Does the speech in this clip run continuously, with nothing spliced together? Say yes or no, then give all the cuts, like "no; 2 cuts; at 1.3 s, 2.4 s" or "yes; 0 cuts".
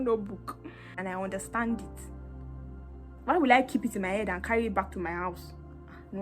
no; 1 cut; at 1.0 s